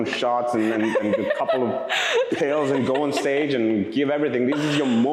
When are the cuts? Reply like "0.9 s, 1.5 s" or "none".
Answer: none